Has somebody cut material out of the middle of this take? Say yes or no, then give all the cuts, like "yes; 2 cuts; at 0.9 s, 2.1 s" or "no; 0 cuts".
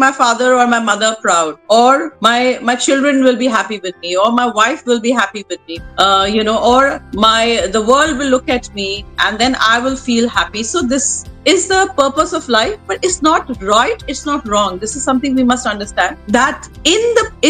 no; 0 cuts